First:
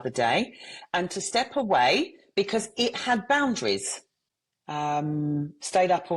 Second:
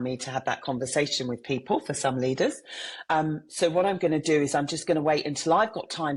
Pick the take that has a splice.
first; 1 cut; at 3.9 s

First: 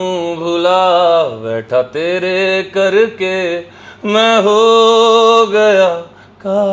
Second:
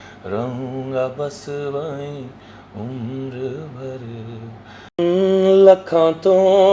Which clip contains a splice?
second; 1 cut; at 5.0 s

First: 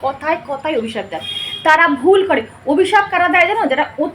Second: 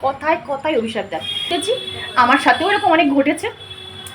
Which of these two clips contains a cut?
second; 1 cut; at 1.5 s

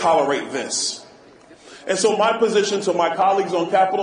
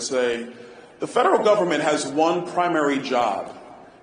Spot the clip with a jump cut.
first; 1 cut; at 2.2 s

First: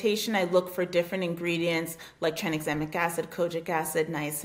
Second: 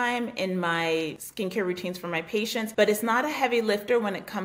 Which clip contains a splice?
second; 2 cuts; at 1.2 s, 2.7 s

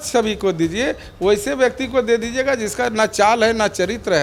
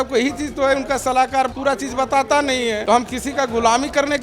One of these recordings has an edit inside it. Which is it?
second; 2 cuts; at 1.5 s, 2.8 s

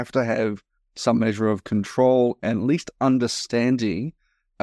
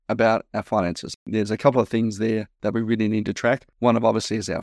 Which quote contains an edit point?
second; 3 cuts; at 1.3 s, 2.5 s, 3.7 s

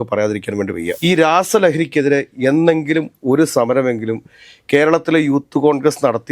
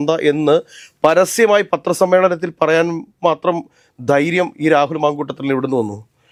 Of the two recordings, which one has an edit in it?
first; 1 cut; at 0.9 s

